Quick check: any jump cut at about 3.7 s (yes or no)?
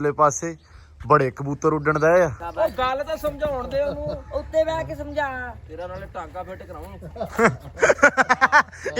no